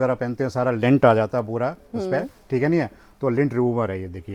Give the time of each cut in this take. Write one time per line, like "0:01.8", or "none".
none

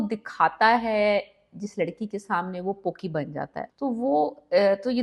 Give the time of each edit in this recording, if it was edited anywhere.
0:03.6

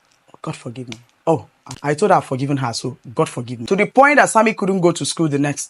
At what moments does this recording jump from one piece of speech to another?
0:01.6
0:03.5

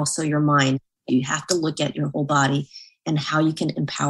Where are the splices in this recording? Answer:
0:01.1

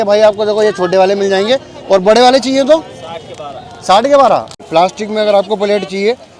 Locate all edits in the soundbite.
0:04.6

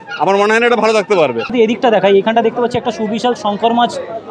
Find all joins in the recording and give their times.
0:01.5

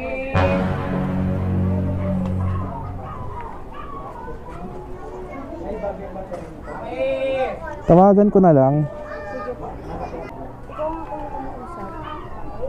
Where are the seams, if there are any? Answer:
0:10.3

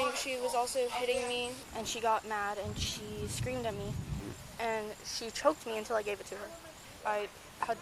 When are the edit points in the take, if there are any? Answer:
0:01.6
0:04.2
0:06.9

